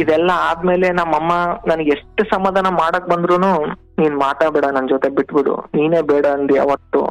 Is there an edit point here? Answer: no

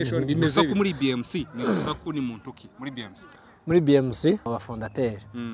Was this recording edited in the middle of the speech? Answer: yes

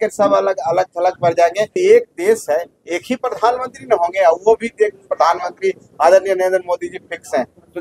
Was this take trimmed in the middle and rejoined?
yes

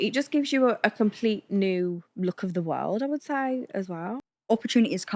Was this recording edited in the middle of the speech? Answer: yes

